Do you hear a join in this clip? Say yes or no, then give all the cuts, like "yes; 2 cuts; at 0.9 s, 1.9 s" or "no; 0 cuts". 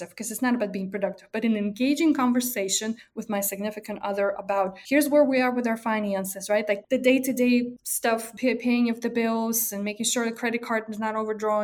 yes; 4 cuts; at 3.1 s, 4.8 s, 6.8 s, 8.0 s